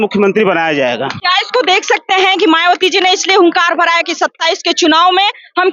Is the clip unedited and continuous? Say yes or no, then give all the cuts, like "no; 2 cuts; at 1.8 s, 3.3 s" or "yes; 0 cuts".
yes; 0 cuts